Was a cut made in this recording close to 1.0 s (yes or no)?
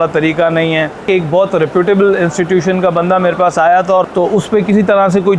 yes